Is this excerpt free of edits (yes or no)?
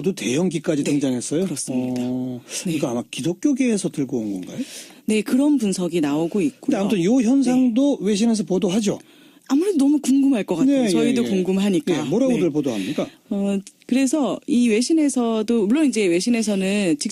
yes